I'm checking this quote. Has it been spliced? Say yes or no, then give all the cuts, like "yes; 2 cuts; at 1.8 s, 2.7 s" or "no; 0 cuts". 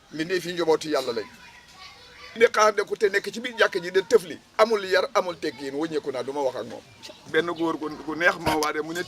yes; 2 cuts; at 2.4 s, 7.3 s